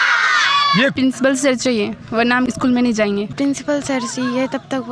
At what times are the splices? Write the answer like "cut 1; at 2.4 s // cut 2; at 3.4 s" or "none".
cut 1; at 0.9 s // cut 2; at 3.3 s